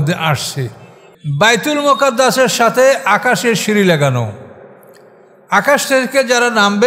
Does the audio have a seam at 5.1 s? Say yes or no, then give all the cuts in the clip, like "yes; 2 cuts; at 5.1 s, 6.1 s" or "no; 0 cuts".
no; 1 cut; at 1.0 s